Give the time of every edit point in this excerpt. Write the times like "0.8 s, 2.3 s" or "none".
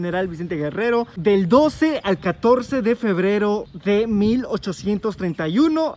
1.1 s, 3.7 s